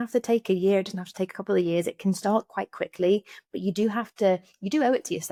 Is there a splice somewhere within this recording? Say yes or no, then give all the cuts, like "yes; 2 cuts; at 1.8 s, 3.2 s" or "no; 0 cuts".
no; 0 cuts